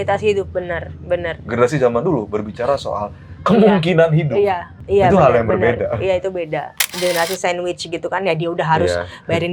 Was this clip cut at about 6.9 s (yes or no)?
yes